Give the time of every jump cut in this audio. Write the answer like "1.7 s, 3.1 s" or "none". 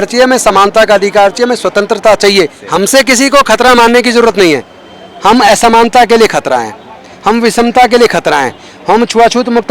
2.6 s